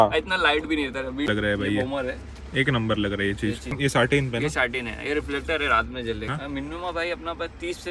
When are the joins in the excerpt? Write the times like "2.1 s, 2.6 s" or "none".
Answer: 1.3 s, 3.8 s, 6.3 s